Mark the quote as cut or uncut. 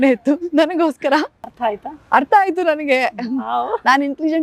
cut